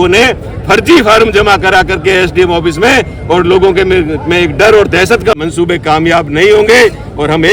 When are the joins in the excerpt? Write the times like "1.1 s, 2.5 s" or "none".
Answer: 5.4 s